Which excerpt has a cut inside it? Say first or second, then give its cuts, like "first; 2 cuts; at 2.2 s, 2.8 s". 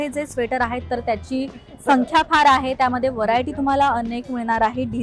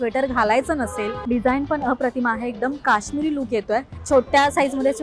second; 2 cuts; at 1.2 s, 3.9 s